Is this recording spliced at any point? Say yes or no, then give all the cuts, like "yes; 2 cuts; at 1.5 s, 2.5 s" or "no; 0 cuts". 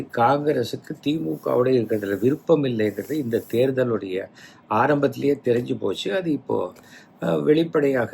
no; 0 cuts